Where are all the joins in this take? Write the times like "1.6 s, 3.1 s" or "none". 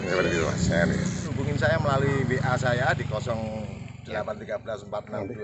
1.2 s